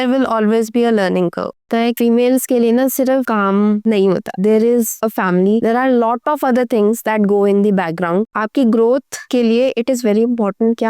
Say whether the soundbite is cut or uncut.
cut